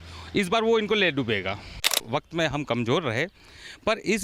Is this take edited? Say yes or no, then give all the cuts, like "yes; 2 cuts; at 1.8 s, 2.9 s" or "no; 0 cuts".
yes; 1 cut; at 1.9 s